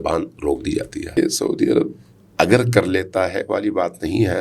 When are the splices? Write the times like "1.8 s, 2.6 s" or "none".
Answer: 1.2 s